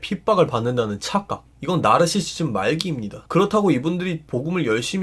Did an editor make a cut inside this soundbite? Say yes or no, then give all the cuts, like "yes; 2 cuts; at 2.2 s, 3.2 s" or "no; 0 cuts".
yes; 1 cut; at 3.1 s